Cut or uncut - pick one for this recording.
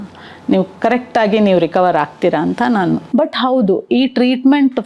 cut